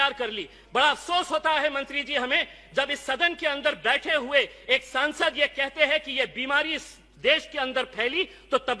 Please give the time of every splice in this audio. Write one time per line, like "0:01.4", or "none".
none